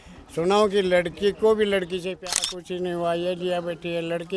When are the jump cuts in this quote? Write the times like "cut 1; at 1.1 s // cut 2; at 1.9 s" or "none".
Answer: cut 1; at 2.1 s